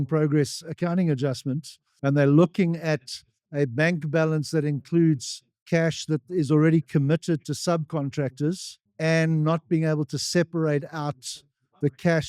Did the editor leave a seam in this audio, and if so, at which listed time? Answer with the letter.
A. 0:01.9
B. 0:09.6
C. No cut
C